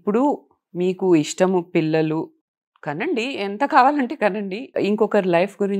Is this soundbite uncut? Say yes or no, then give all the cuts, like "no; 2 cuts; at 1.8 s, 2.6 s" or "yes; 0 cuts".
no; 2 cuts; at 2.4 s, 4.8 s